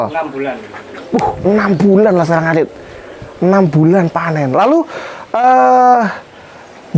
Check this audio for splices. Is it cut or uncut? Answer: uncut